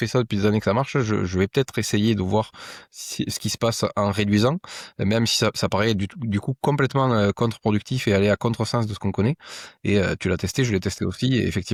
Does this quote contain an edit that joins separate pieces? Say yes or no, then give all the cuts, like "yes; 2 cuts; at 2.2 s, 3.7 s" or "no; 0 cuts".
no; 0 cuts